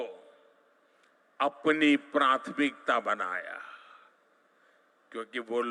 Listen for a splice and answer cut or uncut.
uncut